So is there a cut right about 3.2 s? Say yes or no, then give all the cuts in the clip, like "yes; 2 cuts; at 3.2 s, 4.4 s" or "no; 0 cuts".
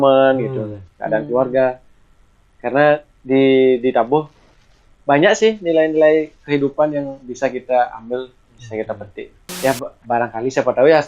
no; 1 cut; at 9.4 s